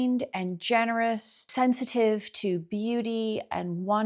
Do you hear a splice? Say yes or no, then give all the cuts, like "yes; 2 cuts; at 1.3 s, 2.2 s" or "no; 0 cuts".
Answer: yes; 1 cut; at 1.5 s